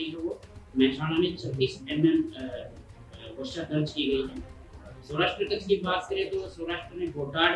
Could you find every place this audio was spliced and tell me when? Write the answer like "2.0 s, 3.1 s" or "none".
none